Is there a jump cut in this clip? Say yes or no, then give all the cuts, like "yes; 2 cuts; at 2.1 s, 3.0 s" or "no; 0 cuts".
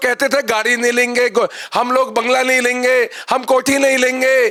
no; 0 cuts